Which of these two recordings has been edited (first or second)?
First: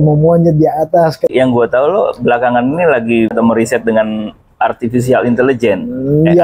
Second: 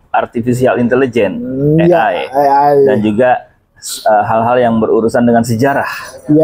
first